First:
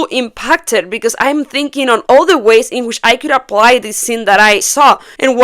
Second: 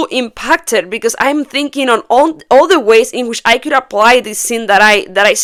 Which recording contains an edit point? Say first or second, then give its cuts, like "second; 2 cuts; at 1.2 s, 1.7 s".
first; 2 cuts; at 2.0 s, 4.7 s